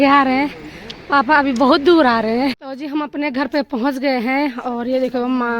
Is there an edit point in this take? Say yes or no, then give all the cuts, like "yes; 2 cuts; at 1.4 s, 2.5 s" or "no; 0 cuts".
yes; 1 cut; at 2.7 s